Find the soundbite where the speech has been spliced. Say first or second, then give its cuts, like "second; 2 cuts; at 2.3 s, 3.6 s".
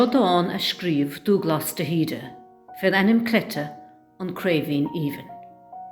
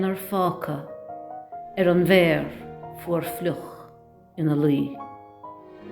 second; 1 cut; at 5.0 s